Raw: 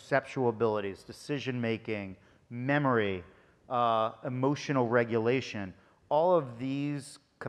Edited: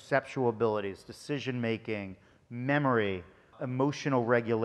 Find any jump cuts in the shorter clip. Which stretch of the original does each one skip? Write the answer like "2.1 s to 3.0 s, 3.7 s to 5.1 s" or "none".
3.6 s to 4.2 s